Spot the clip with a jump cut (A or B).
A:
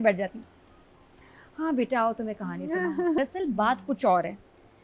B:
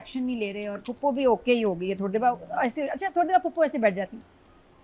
A